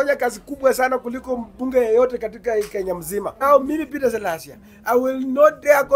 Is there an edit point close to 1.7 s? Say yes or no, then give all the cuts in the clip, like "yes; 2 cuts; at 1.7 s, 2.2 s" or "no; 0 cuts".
no; 1 cut; at 3.4 s